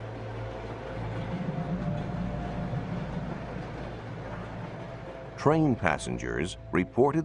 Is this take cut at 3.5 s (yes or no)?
yes